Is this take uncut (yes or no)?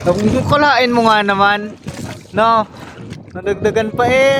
yes